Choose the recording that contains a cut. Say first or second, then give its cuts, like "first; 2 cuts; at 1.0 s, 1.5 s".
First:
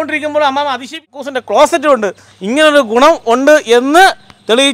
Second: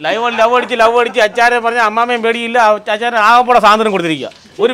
first; 1 cut; at 1.2 s